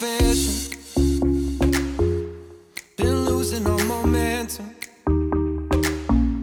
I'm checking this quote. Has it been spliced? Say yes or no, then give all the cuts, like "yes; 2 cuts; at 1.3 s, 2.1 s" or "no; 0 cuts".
no; 0 cuts